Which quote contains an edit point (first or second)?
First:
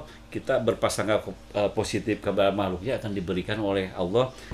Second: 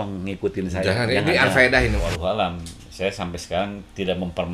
second